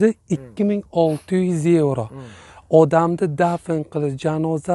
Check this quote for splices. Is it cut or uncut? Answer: uncut